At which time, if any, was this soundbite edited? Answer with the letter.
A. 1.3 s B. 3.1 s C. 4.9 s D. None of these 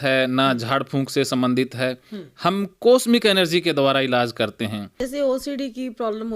C